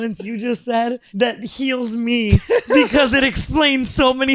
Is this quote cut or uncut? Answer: cut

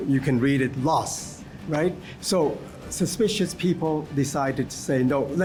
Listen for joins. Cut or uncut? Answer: uncut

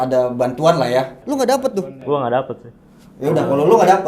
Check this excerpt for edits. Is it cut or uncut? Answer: cut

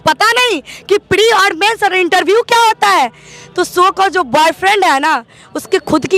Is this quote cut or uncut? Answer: uncut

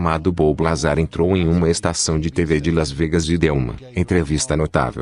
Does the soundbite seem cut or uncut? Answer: cut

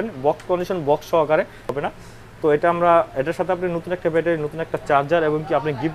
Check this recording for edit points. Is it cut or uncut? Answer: cut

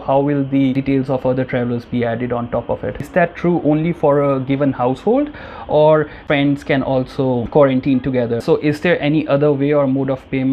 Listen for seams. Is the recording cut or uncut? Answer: cut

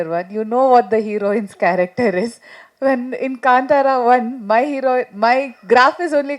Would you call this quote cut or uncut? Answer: uncut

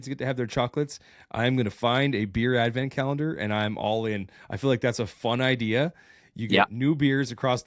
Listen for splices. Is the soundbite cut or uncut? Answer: uncut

